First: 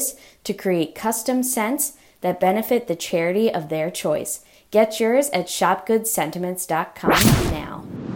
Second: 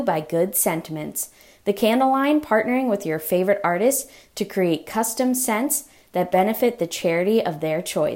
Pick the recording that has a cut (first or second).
first